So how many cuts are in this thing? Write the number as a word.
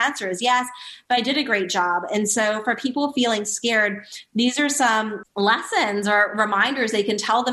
one